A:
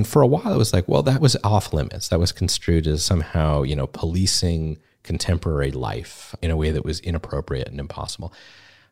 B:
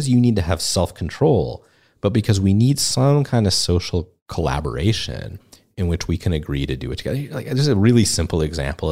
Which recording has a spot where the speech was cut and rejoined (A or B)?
A